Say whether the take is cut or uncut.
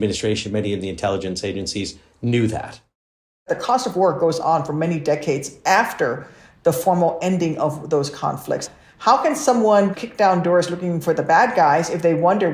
cut